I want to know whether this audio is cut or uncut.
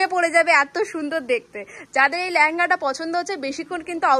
uncut